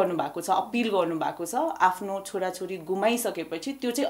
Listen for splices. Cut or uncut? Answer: uncut